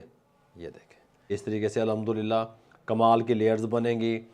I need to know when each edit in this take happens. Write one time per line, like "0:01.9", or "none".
0:01.3